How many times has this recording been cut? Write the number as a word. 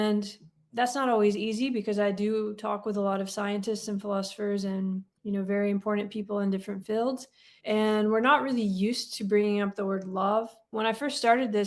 one